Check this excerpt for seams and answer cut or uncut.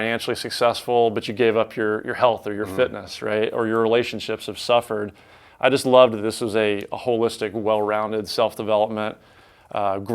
uncut